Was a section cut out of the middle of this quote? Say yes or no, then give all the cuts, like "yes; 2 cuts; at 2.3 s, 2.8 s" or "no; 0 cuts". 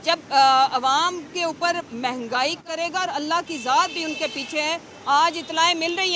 yes; 1 cut; at 2.6 s